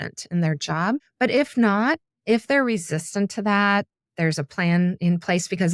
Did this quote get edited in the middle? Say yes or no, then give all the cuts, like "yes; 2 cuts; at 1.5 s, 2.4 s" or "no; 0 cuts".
yes; 2 cuts; at 1.1 s, 2.1 s